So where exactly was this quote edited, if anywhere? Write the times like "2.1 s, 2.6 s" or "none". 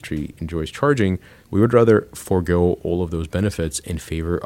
1.3 s